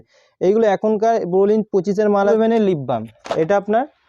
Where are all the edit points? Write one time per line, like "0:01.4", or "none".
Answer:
0:02.3